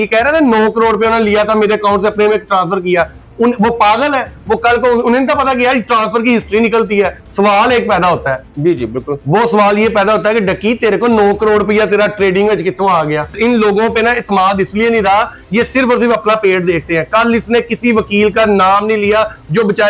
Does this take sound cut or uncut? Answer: cut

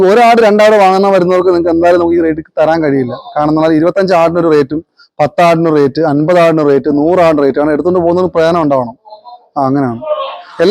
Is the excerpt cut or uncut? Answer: uncut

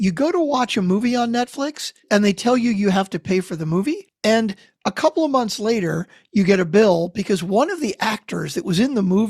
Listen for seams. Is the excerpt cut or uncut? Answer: cut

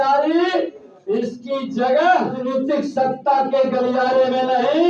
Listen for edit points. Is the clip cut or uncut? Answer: cut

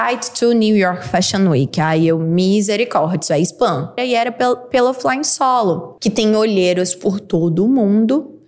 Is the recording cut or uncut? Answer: cut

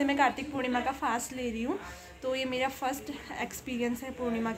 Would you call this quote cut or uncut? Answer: uncut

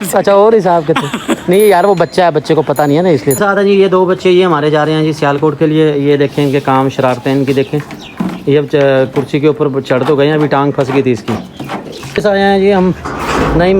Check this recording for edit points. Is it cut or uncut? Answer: cut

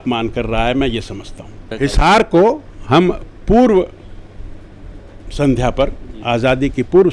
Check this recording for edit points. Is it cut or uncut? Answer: cut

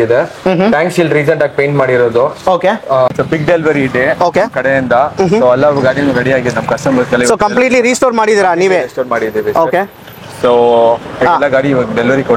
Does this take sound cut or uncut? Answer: cut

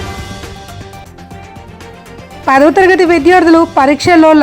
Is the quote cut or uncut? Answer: cut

